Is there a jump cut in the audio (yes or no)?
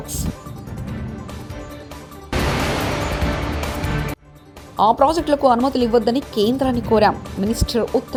no